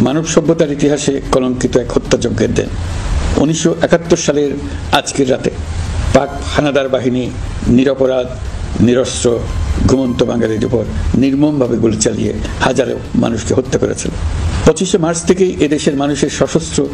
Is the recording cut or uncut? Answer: uncut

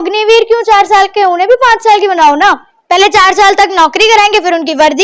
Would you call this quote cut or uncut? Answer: cut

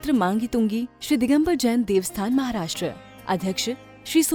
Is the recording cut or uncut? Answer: uncut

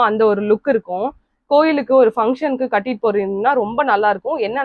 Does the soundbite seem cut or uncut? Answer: uncut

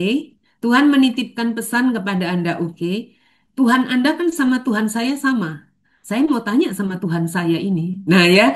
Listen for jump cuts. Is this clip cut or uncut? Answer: uncut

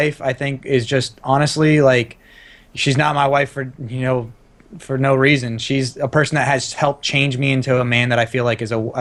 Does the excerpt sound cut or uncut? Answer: uncut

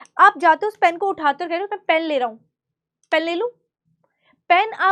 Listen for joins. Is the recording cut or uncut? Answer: uncut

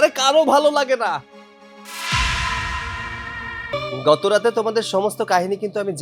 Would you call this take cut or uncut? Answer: cut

